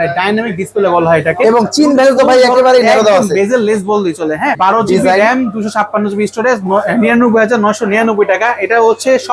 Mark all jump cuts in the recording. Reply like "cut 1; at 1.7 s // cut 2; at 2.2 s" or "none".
cut 1; at 4.5 s